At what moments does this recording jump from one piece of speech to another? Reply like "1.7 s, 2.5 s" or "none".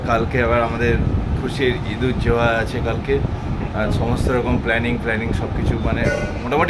none